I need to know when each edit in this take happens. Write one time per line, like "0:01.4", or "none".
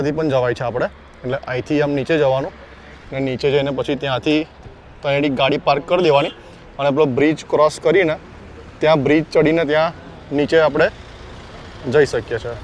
none